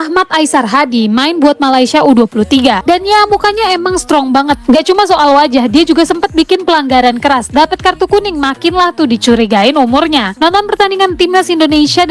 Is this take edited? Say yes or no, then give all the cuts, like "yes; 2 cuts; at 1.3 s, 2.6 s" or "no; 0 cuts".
no; 0 cuts